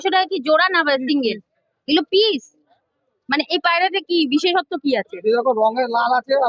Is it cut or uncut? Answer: uncut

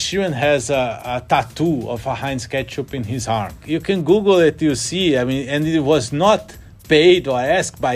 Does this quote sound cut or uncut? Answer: uncut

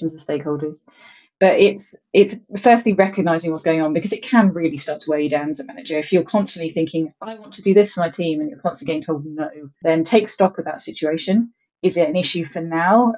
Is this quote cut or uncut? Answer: cut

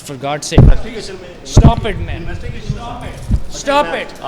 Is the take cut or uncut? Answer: uncut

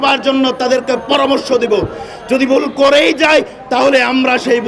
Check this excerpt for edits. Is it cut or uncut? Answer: uncut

